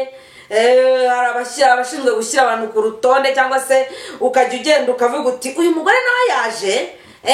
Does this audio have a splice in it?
no; 0 cuts

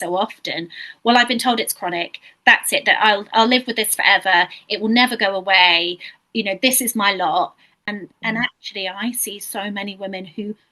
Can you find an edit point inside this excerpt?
yes; 1 cut; at 7.7 s

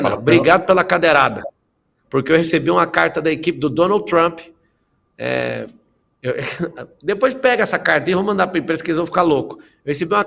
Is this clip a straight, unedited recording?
yes; 0 cuts

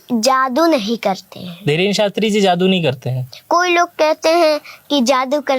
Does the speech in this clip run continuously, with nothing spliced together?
yes; 0 cuts

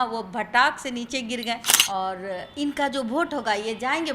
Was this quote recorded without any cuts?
no; 1 cut; at 1.7 s

